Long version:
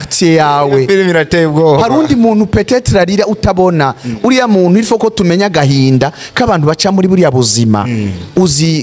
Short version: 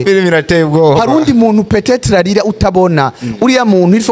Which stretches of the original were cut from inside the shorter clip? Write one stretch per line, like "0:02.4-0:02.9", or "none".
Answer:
none